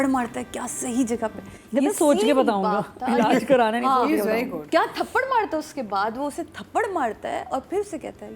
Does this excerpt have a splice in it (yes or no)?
no